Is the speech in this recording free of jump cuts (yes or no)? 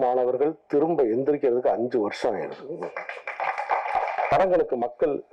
no